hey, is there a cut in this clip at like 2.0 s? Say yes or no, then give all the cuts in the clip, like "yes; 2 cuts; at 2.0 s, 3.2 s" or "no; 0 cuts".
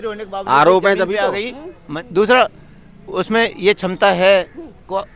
yes; 1 cut; at 2.0 s